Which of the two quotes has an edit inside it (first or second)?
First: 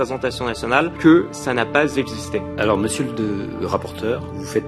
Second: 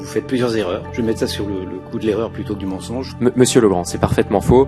first